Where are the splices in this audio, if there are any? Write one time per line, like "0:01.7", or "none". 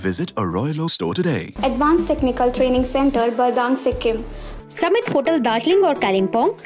0:01.5
0:04.4